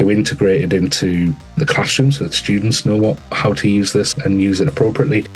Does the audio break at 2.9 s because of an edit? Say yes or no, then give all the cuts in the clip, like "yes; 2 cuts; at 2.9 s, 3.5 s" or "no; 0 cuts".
no; 2 cuts; at 1.5 s, 4.1 s